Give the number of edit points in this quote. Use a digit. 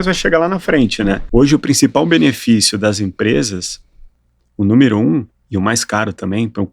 1